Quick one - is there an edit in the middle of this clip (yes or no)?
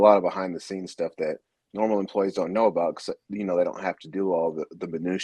no